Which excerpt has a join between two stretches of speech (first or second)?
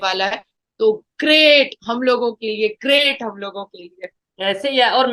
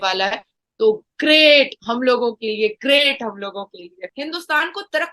second